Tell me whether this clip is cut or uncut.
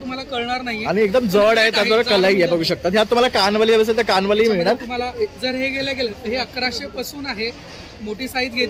uncut